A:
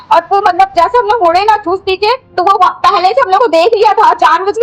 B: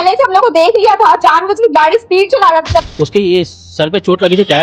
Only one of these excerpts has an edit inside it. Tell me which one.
B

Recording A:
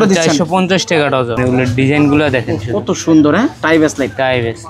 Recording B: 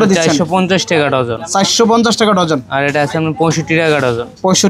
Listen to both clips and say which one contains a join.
A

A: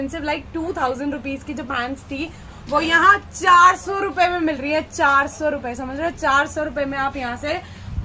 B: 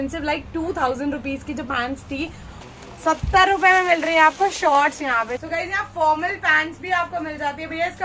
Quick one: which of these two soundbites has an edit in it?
B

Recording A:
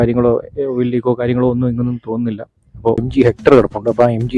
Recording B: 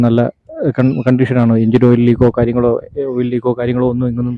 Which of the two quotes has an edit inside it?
A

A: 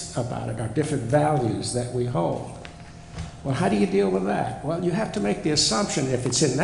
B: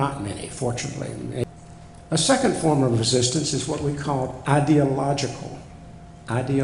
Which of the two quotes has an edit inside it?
B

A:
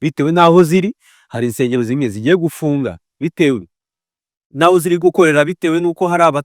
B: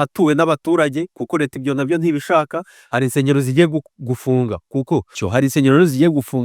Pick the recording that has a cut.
B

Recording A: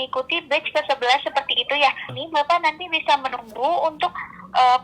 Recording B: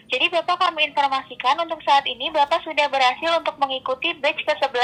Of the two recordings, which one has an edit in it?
A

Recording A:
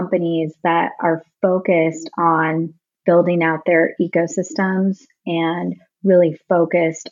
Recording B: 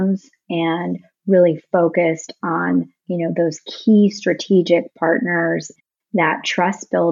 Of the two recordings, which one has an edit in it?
B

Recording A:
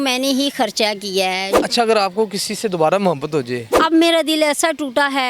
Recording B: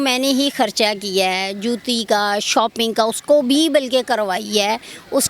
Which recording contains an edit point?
A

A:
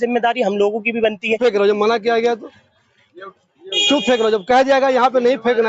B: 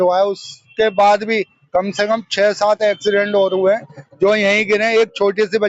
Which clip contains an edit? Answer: A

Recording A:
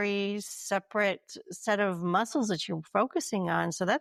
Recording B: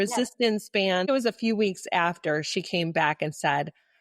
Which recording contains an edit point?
B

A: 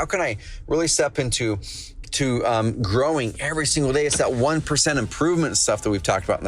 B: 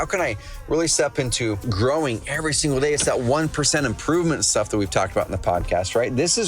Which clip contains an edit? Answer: B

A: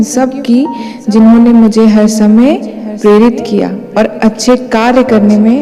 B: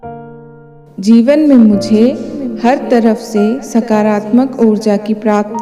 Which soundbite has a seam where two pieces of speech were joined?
B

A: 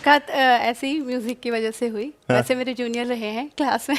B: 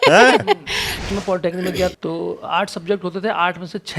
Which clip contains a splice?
B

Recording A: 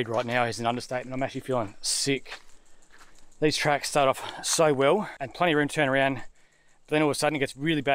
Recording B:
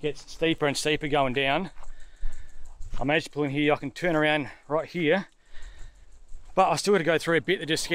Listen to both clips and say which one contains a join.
A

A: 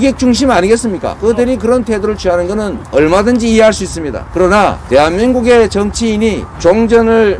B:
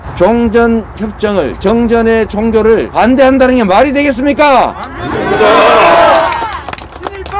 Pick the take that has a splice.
A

